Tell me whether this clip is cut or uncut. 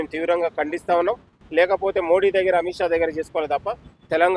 cut